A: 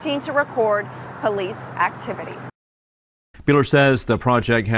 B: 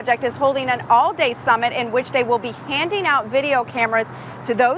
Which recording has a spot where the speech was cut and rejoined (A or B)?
A